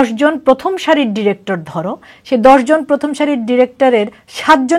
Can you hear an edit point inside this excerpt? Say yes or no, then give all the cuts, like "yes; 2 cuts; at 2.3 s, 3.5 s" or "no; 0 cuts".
no; 0 cuts